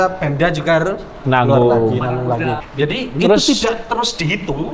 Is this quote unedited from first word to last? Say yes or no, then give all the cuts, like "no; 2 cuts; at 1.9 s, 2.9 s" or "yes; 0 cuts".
no; 1 cut; at 2.6 s